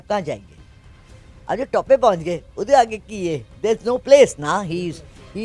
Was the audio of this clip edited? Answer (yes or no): yes